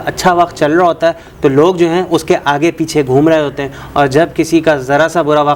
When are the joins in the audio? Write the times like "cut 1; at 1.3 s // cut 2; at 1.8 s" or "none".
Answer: none